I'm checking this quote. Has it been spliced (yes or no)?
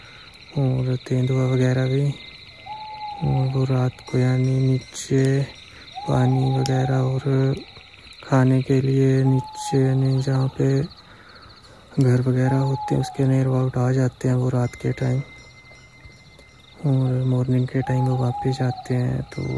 no